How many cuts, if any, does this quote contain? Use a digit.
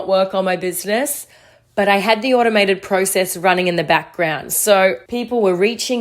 1